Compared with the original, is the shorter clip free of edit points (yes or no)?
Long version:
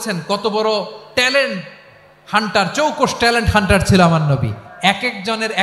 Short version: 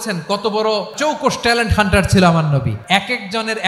no